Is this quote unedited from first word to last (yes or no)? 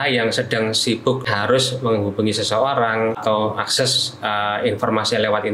no